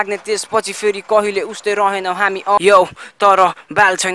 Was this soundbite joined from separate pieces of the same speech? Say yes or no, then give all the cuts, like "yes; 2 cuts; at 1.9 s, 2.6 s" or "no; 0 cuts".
yes; 1 cut; at 2.6 s